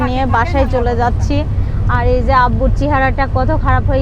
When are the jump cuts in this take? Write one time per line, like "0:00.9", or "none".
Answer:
none